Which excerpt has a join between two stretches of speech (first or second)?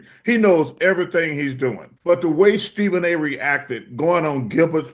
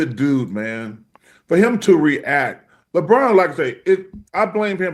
first